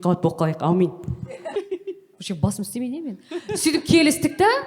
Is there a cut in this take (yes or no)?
yes